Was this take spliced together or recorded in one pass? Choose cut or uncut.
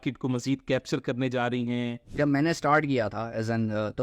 cut